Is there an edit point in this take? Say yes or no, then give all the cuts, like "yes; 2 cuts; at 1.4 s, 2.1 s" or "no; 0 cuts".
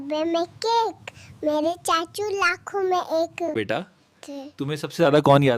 yes; 1 cut; at 3.5 s